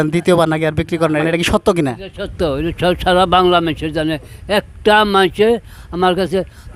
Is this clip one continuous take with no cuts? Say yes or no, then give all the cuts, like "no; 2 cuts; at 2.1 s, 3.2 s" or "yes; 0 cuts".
yes; 0 cuts